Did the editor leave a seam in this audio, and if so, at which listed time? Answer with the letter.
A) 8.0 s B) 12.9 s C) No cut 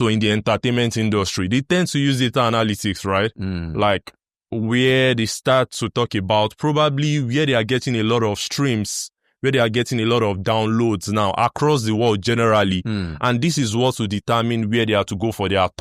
C